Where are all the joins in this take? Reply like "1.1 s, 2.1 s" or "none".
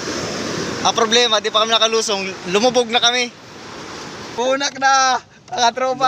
4.3 s